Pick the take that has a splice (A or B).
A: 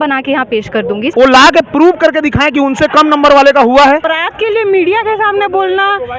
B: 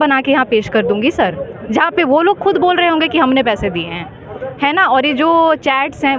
A